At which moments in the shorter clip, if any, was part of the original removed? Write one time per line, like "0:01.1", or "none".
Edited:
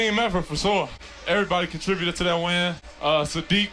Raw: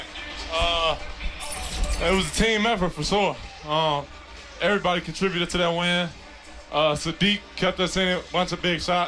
0:01.0
0:02.9